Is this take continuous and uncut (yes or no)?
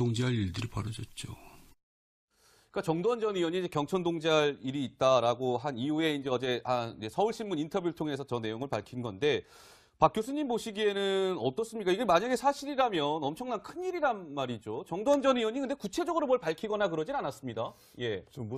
no